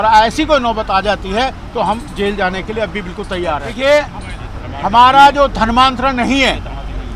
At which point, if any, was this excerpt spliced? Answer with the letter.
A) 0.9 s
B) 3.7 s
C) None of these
B